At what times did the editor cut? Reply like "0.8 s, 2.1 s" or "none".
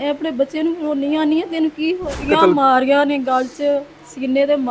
2.2 s